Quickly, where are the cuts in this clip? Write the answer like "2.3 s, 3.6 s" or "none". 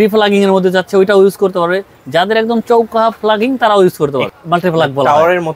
4.3 s